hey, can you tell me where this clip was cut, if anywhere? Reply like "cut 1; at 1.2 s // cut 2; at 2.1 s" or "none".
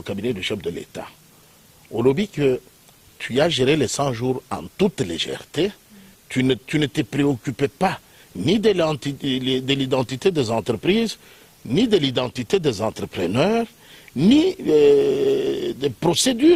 none